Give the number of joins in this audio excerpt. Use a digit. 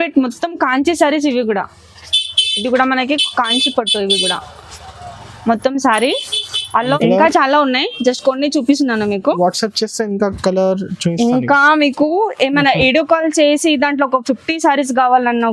1